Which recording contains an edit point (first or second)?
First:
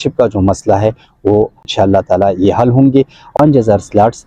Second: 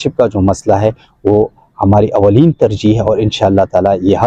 first